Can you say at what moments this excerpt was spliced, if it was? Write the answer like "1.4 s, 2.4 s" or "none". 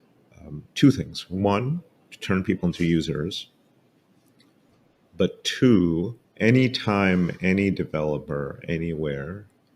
6.2 s